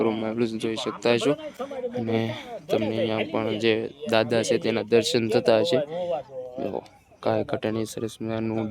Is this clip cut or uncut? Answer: uncut